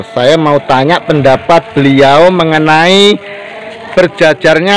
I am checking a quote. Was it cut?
yes; 1 cut; at 1.7 s

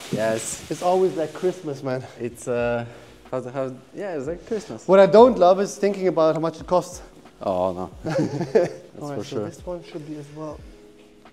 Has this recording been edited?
no; 0 cuts

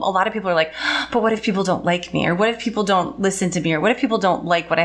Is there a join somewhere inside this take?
no; 0 cuts

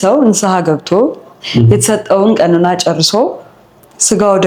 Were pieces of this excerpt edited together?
no; 0 cuts

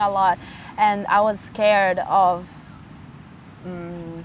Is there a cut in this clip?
no; 0 cuts

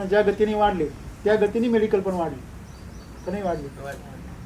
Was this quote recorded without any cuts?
yes; 0 cuts

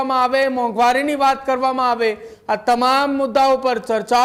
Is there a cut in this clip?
no; 0 cuts

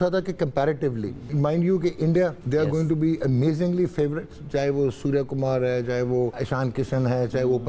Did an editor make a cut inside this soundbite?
yes; 3 cuts; at 1.3 s, 2.4 s, 6.4 s

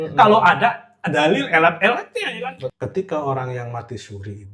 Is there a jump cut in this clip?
yes; 1 cut; at 2.6 s

